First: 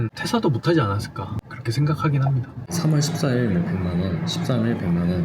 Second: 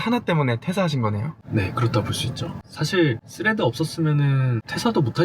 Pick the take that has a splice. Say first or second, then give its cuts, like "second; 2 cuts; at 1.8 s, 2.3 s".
first; 1 cut; at 2.7 s